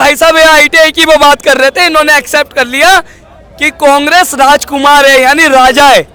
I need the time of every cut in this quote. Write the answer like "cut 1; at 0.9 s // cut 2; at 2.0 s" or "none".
none

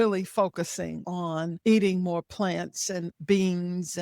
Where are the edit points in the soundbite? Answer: cut 1; at 1.3 s

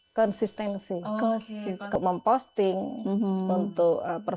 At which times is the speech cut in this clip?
cut 1; at 2.0 s

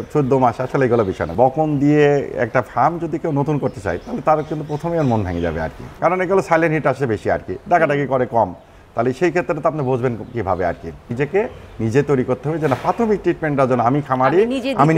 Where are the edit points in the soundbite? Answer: cut 1; at 1.3 s // cut 2; at 5.8 s // cut 3; at 11.1 s

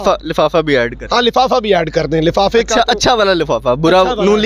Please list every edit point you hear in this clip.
none

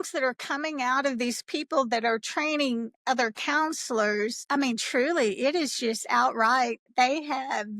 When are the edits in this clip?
none

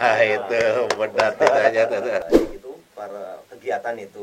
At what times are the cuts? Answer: cut 1; at 2.2 s

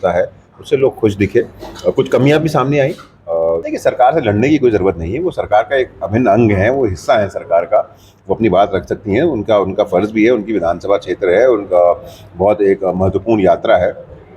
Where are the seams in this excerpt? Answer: cut 1; at 3.6 s

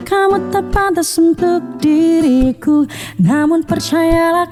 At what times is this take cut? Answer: none

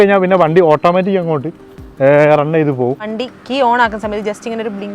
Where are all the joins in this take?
cut 1; at 3.1 s

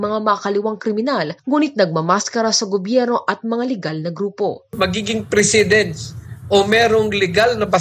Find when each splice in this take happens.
none

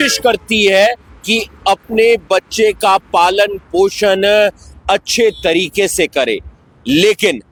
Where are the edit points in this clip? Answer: none

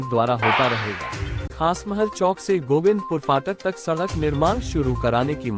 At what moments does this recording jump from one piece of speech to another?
cut 1; at 1.5 s

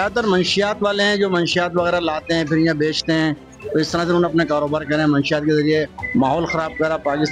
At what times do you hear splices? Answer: none

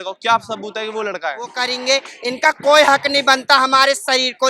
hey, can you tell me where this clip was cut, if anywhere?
cut 1; at 1.6 s

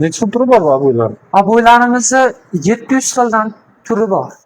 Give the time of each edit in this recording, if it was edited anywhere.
none

